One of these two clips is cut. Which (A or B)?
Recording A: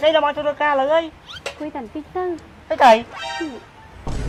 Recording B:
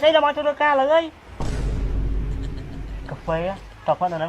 B